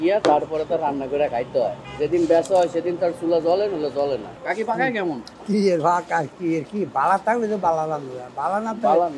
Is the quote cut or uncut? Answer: cut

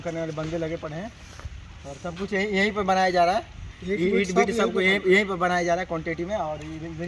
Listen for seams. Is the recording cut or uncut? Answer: uncut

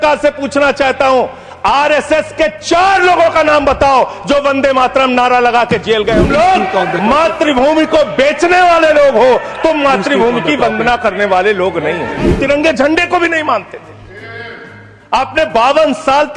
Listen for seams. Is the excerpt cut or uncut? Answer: cut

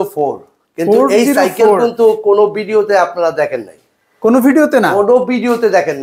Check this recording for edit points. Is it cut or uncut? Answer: uncut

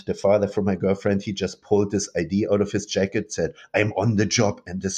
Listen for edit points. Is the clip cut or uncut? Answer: uncut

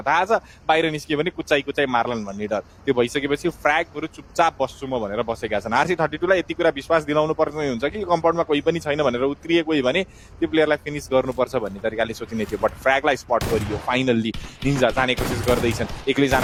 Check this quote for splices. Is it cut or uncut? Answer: uncut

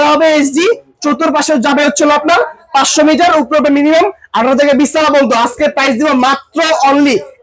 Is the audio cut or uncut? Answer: uncut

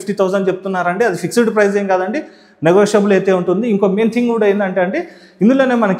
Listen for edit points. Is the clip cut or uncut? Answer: uncut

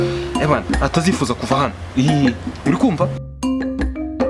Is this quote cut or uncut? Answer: uncut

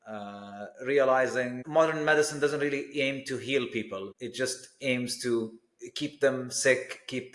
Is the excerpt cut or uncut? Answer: cut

